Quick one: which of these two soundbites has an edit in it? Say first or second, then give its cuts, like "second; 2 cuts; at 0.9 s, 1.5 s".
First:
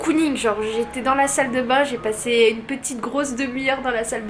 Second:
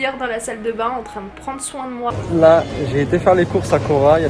second; 1 cut; at 2.1 s